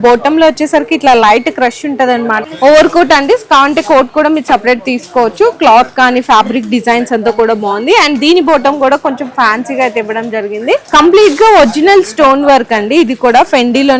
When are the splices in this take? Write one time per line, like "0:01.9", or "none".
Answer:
0:02.4
0:10.8